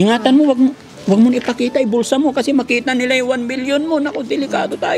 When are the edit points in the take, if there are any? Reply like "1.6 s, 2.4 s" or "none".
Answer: none